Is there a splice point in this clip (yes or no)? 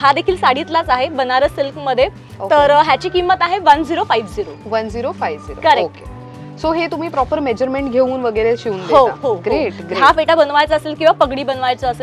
no